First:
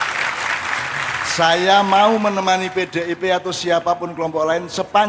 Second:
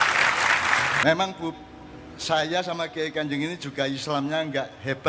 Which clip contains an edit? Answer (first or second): second